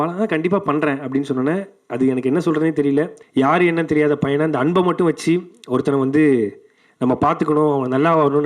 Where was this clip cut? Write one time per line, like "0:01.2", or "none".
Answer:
0:03.2